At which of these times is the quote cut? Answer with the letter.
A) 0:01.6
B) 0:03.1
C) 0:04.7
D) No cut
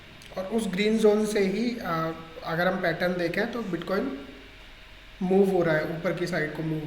A